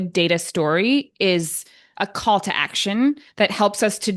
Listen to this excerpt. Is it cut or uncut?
uncut